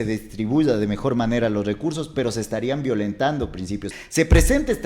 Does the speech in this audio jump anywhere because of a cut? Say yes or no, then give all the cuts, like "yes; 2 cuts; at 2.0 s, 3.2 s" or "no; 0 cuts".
yes; 1 cut; at 3.9 s